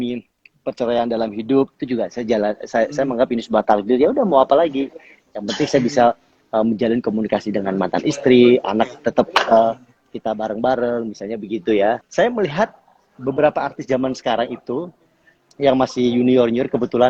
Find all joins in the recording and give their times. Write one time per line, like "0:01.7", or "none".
0:12.1